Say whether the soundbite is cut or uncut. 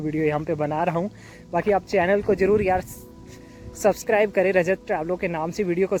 uncut